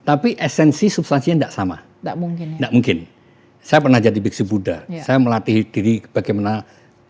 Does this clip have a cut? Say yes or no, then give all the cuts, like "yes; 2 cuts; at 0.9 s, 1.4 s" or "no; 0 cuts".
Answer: no; 0 cuts